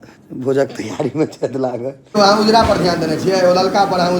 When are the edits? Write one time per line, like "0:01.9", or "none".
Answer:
0:02.2